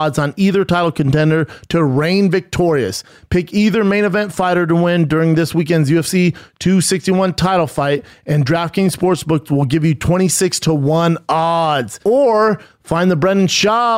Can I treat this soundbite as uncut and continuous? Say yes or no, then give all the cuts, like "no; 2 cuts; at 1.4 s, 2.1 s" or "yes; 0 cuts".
no; 1 cut; at 11.9 s